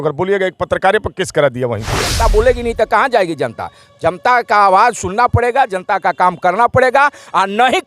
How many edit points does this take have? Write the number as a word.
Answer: one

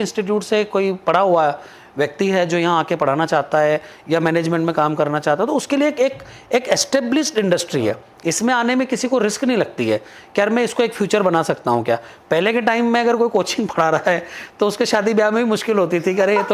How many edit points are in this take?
zero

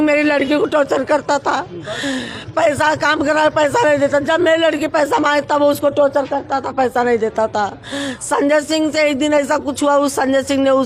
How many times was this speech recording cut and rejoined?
zero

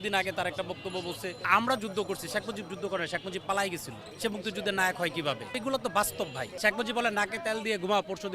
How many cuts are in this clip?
four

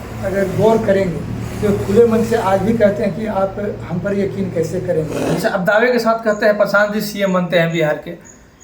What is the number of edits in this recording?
one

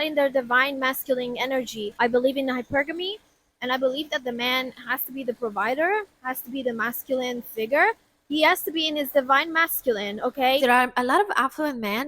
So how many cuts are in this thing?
two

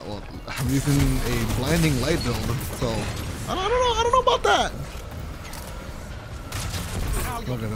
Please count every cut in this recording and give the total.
one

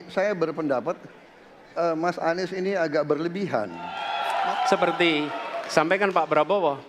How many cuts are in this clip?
one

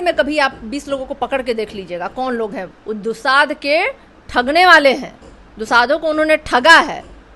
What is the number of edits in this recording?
one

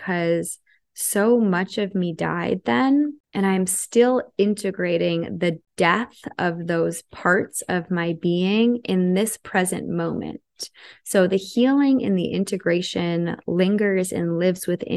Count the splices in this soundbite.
two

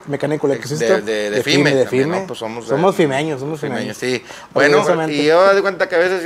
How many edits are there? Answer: one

